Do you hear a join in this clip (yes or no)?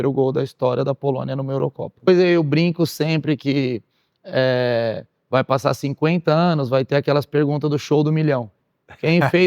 yes